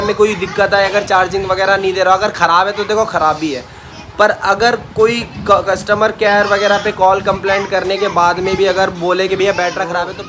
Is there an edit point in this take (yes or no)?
no